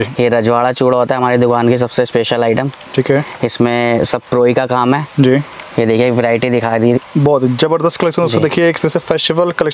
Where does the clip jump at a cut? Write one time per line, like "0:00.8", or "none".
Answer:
none